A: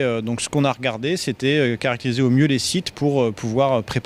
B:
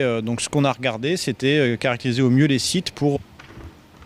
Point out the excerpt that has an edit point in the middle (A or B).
A